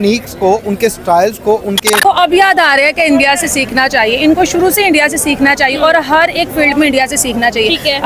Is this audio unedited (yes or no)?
no